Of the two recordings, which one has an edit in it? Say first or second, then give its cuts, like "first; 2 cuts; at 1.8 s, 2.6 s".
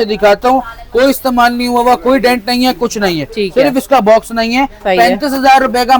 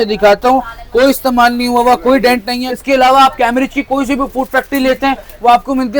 second; 1 cut; at 2.6 s